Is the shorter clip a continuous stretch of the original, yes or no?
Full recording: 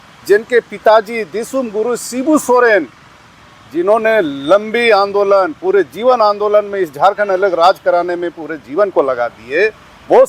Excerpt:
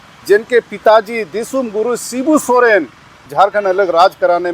no